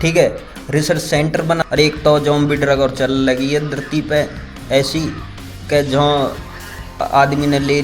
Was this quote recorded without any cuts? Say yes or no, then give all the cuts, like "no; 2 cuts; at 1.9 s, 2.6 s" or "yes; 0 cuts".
no; 1 cut; at 1.6 s